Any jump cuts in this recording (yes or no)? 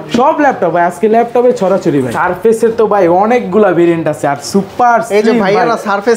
yes